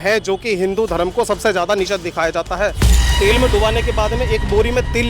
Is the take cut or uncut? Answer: cut